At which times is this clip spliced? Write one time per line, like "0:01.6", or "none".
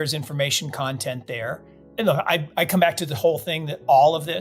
0:01.8

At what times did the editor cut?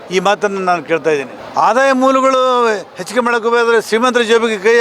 0:01.4

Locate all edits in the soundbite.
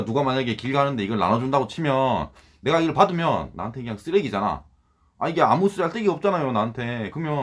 none

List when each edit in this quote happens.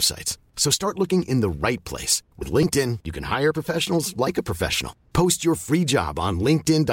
none

